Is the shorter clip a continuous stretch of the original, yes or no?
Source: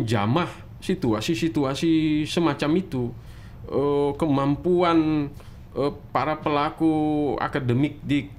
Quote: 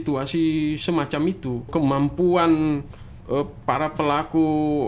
no